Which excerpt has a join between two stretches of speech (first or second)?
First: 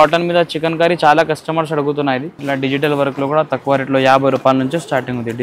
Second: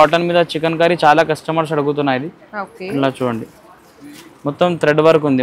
first